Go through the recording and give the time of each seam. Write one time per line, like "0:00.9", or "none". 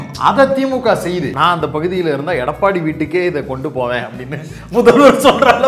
0:01.3

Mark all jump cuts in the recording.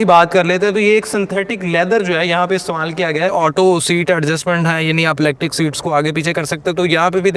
0:03.3

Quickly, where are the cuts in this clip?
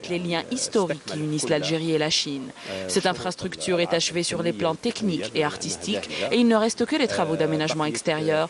0:06.9

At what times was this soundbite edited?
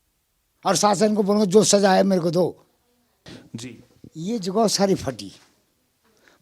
0:03.3

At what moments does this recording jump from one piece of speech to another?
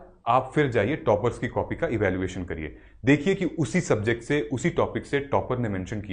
none

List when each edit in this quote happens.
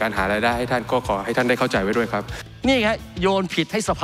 0:02.4

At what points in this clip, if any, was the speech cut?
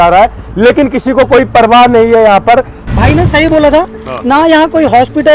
0:02.8

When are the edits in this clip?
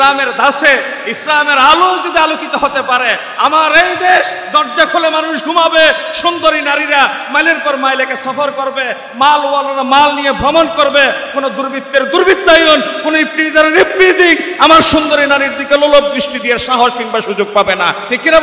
none

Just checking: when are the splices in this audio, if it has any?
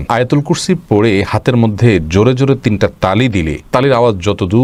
none

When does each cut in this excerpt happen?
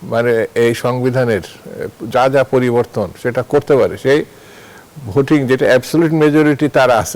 none

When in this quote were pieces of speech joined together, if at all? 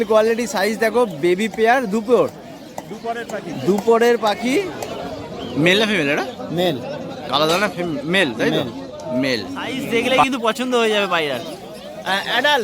0:04.8
0:10.2

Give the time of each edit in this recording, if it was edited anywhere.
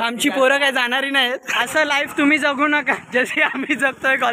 0:01.5
0:03.0

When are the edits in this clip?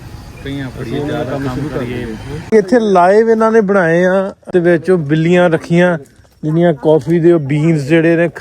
0:02.5
0:04.4

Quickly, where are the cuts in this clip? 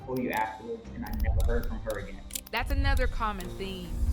0:02.3

